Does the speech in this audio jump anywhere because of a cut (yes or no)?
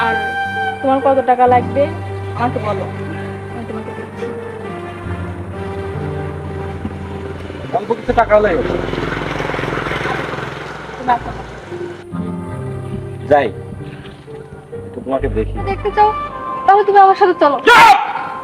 yes